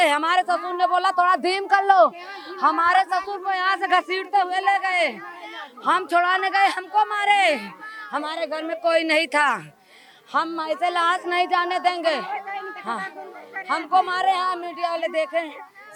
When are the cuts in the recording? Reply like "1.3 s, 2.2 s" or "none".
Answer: none